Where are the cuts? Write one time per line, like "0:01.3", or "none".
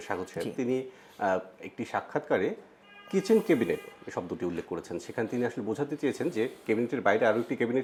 none